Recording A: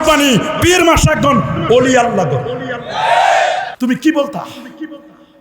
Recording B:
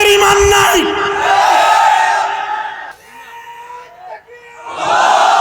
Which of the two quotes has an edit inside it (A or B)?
A